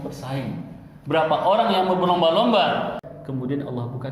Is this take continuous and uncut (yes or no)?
no